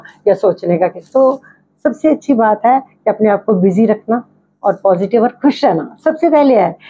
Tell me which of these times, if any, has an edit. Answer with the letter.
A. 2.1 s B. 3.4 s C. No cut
C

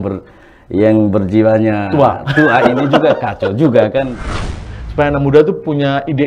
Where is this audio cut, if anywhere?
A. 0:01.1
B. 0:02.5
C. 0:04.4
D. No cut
C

